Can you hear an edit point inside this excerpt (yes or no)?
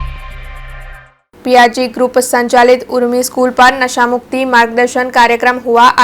yes